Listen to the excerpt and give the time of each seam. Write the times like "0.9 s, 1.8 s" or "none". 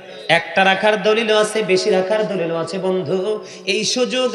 none